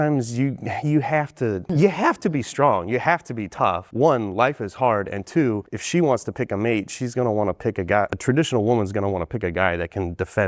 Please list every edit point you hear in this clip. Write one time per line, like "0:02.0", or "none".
0:01.6
0:03.8
0:05.7
0:08.1